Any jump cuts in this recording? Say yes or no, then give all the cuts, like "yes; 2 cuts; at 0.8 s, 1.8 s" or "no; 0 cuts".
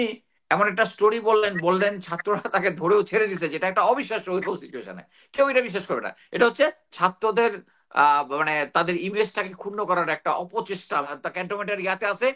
yes; 1 cut; at 11.1 s